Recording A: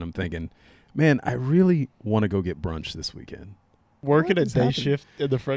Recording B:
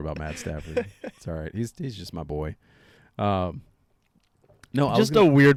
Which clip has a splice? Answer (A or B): A